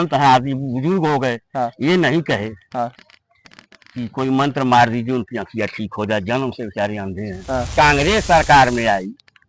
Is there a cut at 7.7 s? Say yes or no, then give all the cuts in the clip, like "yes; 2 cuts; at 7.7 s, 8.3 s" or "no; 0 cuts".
yes; 1 cut; at 7.7 s